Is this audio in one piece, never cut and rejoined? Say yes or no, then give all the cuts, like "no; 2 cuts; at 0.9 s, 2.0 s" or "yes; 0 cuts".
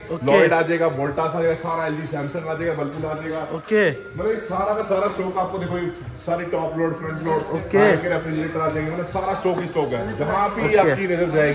yes; 0 cuts